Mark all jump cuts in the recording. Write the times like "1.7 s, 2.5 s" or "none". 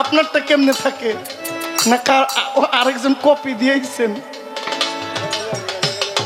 none